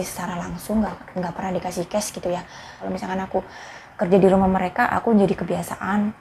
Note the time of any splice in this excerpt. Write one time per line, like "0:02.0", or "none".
0:02.8